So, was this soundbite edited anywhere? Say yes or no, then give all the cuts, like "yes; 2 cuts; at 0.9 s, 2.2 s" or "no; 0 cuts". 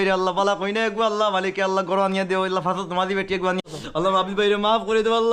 yes; 1 cut; at 3.6 s